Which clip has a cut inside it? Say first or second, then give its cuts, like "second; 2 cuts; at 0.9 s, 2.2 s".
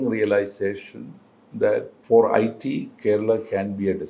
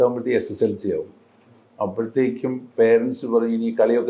first; 1 cut; at 1.9 s